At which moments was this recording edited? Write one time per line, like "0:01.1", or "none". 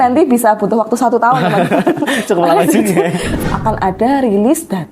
0:03.3